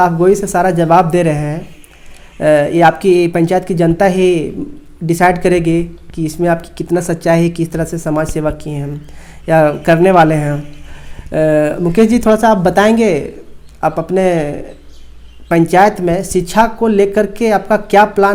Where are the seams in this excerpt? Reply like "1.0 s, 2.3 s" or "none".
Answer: none